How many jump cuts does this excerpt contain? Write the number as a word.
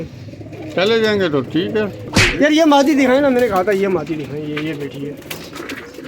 one